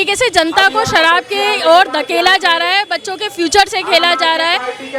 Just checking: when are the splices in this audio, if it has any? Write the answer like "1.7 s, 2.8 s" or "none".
none